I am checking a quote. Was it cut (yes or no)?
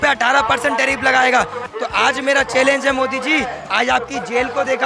yes